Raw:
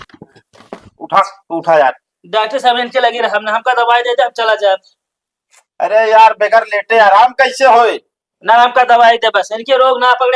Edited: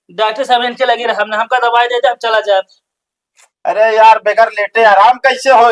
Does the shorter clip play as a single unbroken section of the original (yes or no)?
yes